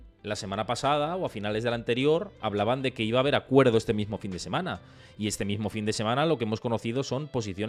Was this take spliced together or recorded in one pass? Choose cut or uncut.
uncut